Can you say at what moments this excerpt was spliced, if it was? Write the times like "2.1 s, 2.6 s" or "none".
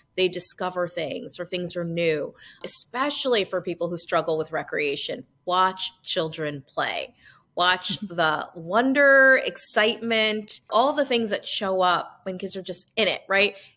2.6 s, 10.7 s